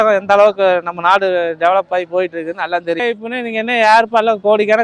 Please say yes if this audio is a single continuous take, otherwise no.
no